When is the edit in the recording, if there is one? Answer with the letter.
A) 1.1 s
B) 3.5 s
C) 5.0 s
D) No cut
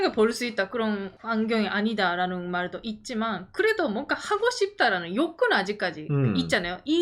A